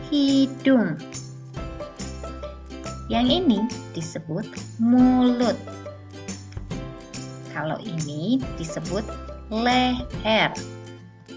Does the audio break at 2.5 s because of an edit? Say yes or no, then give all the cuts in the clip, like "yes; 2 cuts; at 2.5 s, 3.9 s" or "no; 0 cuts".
yes; 5 cuts; at 1.0 s, 2.5 s, 5.6 s, 6.9 s, 10.6 s